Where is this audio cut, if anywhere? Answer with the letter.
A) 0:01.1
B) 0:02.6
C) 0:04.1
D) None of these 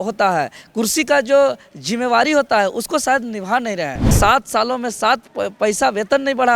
C